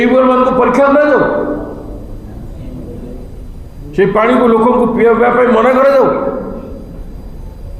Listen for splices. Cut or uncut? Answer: uncut